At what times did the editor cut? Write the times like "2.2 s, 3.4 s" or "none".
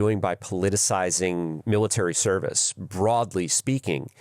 1.6 s